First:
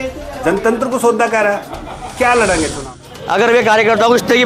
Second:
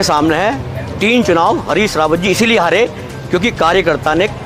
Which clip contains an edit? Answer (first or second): first